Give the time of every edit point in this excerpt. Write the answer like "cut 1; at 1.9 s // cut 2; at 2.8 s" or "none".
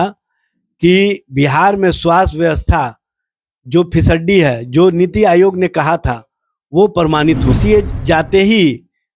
cut 1; at 7.6 s